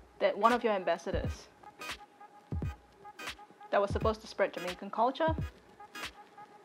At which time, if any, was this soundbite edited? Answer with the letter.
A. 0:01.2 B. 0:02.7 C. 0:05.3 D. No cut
C